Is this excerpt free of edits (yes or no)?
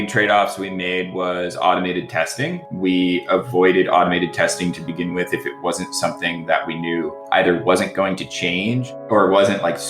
no